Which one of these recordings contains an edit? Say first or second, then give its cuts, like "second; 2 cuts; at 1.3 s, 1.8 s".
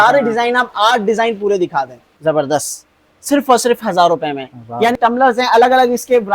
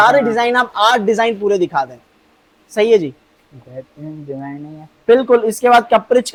first; 2 cuts; at 2.0 s, 5.0 s